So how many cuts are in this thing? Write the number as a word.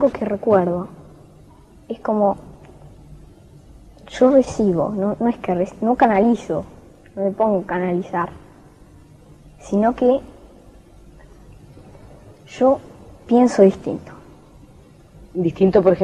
zero